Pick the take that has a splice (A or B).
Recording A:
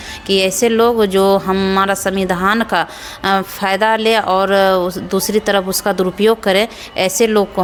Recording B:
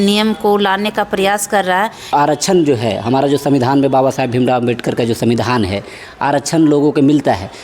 B